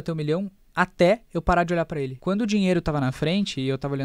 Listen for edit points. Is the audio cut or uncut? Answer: cut